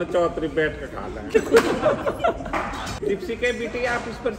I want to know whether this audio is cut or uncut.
cut